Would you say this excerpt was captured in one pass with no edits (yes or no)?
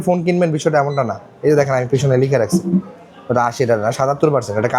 yes